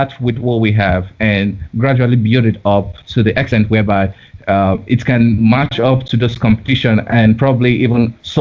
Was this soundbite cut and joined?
no; 0 cuts

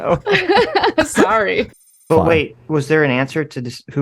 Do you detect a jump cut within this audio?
yes; 1 cut; at 2.0 s

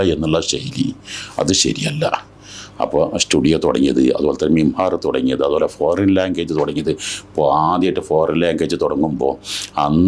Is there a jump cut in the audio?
no; 0 cuts

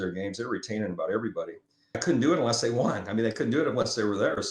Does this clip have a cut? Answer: yes; 1 cut; at 2.0 s

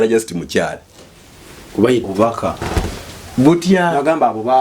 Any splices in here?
yes; 1 cut; at 2.0 s

